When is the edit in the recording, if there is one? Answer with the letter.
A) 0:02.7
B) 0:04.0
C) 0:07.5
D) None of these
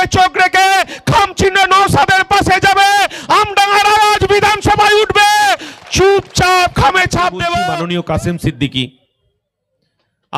C